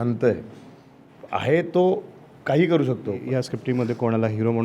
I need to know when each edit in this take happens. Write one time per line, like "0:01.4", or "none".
0:03.2